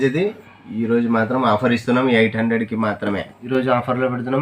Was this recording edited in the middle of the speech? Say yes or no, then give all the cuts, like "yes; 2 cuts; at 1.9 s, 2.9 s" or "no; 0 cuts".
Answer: yes; 1 cut; at 3.3 s